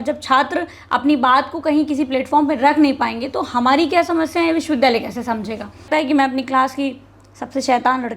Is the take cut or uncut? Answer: cut